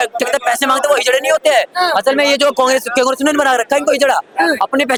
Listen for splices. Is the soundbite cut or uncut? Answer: uncut